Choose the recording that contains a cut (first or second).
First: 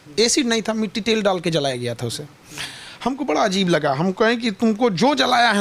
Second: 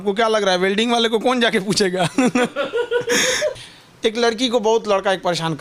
second